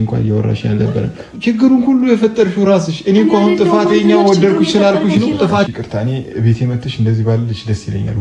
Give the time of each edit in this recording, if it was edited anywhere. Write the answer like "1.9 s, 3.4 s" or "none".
1.2 s, 5.5 s